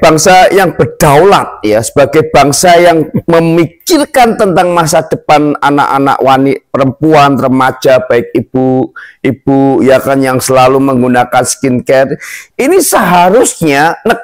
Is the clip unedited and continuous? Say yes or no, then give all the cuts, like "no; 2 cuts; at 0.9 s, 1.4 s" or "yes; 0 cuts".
yes; 0 cuts